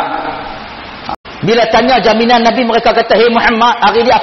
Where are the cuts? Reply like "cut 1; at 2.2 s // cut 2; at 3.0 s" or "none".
cut 1; at 1.2 s